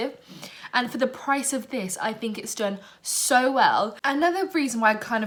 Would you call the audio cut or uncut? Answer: uncut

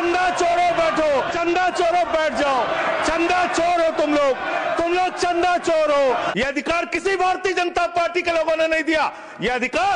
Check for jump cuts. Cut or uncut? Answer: cut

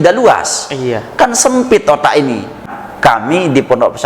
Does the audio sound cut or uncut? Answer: cut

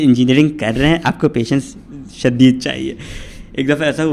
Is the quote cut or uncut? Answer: uncut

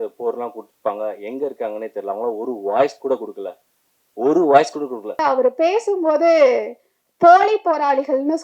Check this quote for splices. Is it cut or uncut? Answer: cut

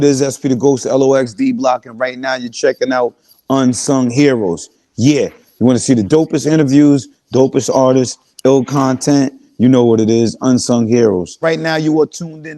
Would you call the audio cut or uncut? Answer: cut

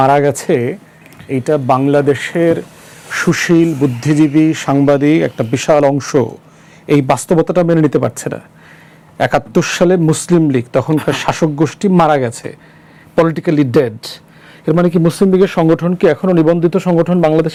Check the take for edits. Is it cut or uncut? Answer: uncut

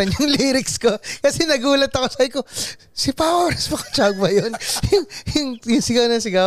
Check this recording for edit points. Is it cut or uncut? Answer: uncut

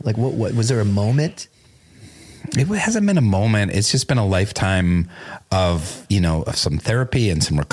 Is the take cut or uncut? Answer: uncut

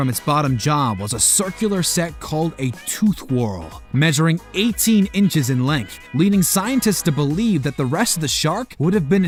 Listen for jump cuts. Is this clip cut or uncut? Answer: uncut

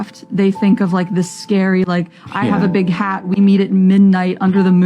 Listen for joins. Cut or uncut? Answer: uncut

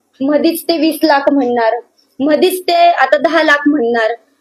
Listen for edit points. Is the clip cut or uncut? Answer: uncut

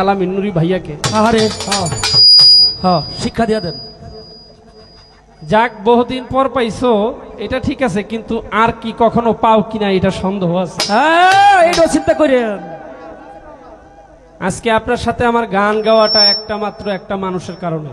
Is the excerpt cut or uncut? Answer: uncut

